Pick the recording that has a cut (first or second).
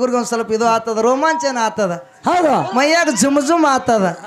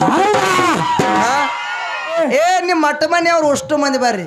second